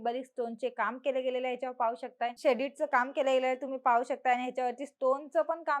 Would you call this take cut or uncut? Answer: cut